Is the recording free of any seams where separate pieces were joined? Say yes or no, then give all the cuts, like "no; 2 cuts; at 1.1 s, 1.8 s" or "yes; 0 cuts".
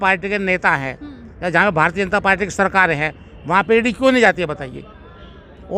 yes; 0 cuts